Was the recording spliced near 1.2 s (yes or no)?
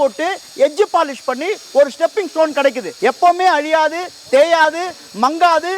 no